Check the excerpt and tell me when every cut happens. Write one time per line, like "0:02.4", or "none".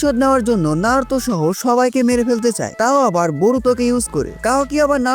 0:02.7